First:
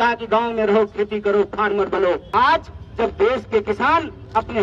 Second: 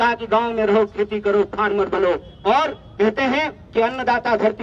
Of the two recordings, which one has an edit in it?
first; 1 cut; at 2.3 s

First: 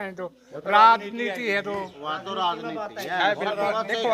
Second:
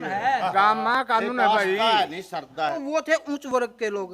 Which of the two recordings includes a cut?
second; 1 cut; at 2.8 s

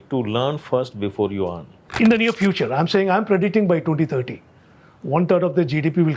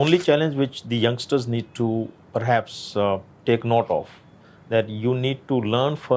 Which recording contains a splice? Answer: first; 1 cut; at 1.9 s

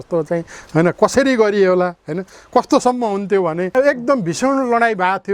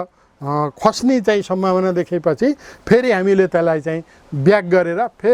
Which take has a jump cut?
first; 1 cut; at 3.7 s

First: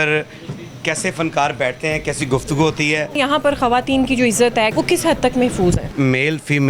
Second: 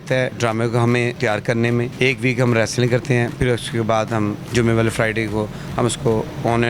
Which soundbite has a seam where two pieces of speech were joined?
first; 3 cuts; at 3.2 s, 4.7 s, 5.9 s

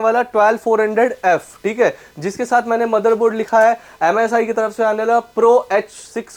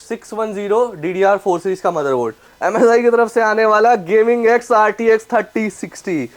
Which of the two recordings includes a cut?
second; 1 cut; at 2.4 s

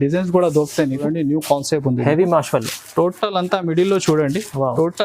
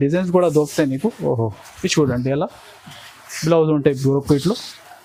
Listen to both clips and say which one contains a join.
first; 1 cut; at 1.0 s

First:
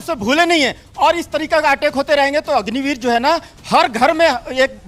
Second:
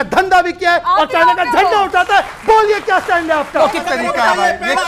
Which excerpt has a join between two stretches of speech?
second; 1 cut; at 3.8 s

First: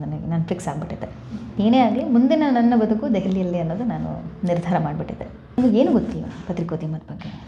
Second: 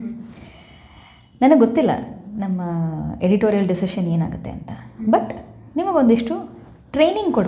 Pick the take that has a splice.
first; 1 cut; at 5.6 s

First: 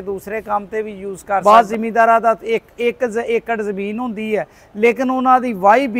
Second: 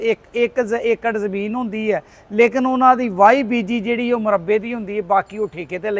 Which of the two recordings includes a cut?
first; 1 cut; at 1.4 s

